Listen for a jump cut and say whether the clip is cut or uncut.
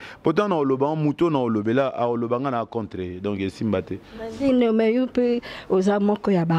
uncut